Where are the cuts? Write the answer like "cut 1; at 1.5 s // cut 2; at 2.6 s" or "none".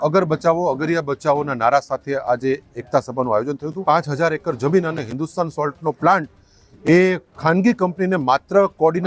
cut 1; at 3.8 s